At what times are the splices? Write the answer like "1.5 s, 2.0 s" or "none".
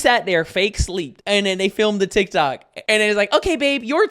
1.1 s, 2.7 s